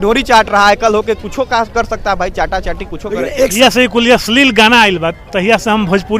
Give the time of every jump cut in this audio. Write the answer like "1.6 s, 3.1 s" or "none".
3.5 s